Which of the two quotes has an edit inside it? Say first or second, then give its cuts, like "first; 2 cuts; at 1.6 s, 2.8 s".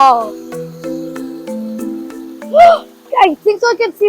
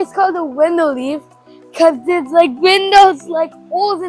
first; 1 cut; at 3.1 s